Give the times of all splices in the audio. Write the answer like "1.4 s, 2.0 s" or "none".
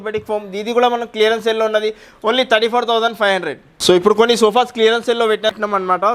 none